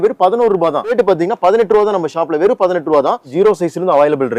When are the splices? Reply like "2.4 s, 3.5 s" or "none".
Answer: 0.9 s, 3.3 s